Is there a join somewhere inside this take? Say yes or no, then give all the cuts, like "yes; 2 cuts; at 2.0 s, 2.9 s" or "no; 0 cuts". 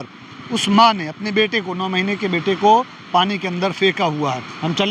no; 0 cuts